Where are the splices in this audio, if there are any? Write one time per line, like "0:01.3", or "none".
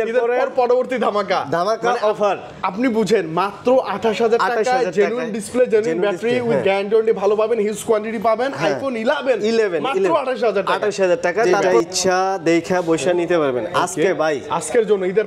0:11.5